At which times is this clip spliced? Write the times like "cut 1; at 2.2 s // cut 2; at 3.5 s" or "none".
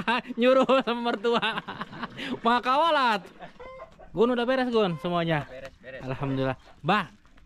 cut 1; at 3.8 s

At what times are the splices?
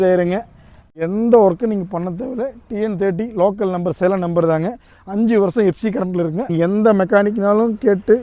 cut 1; at 1.0 s // cut 2; at 6.4 s

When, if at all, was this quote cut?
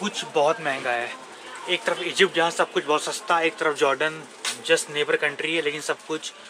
none

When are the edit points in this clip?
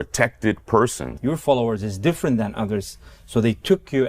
cut 1; at 1.1 s

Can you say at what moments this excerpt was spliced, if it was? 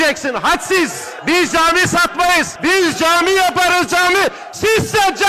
cut 1; at 1.1 s // cut 2; at 2.5 s

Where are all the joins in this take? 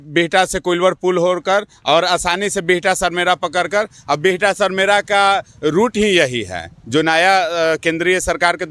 none

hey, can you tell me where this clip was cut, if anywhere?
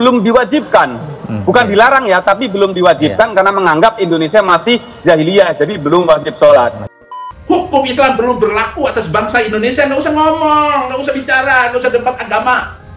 cut 1; at 7.0 s

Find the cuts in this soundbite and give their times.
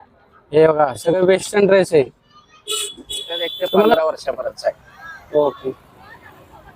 cut 1; at 3.9 s

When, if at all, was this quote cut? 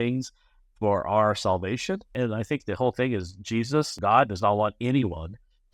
cut 1; at 2.1 s // cut 2; at 3.9 s

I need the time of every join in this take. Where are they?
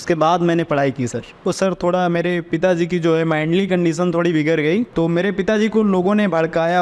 cut 1; at 1.3 s // cut 2; at 4.9 s

